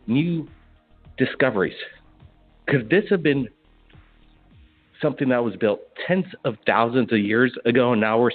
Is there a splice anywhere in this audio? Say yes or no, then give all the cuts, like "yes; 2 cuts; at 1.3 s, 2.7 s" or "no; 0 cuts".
no; 0 cuts